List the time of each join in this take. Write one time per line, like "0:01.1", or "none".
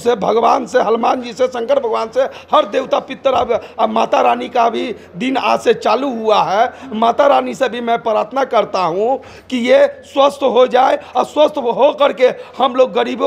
none